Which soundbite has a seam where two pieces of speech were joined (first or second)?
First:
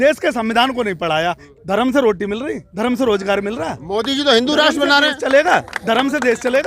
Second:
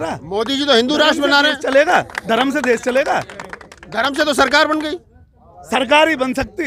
first